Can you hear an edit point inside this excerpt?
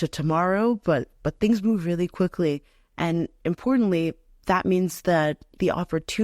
no; 0 cuts

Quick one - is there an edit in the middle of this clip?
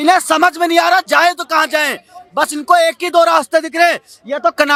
no; 0 cuts

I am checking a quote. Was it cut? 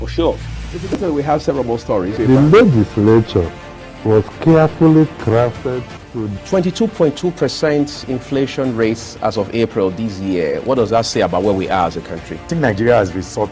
yes; 1 cut; at 0.9 s

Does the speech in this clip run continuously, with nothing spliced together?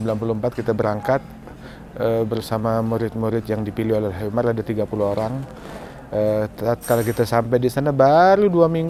yes; 0 cuts

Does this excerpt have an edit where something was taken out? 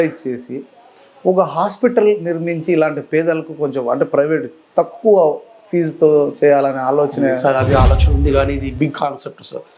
no; 0 cuts

